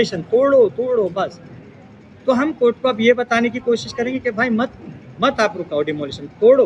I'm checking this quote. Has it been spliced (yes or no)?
no